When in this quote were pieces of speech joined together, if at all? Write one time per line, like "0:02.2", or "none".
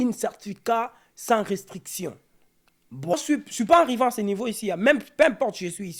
0:03.1